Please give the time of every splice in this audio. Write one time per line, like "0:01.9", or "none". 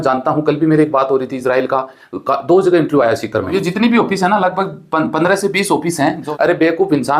0:03.5
0:06.2